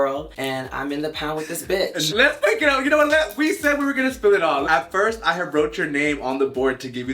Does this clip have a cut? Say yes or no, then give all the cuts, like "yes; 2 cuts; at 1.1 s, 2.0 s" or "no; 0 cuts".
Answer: yes; 2 cuts; at 2.0 s, 4.6 s